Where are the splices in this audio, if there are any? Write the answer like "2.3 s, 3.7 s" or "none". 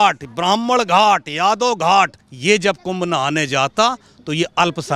2.3 s